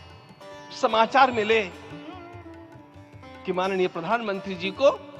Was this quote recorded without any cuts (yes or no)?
no